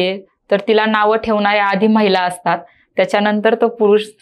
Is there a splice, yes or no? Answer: no